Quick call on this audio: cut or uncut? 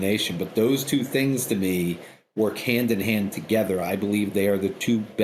uncut